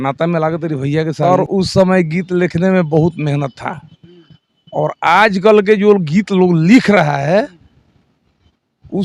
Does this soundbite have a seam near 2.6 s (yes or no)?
no